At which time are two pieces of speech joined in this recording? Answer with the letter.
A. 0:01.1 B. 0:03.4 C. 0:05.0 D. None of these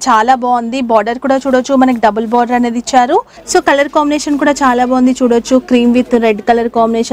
B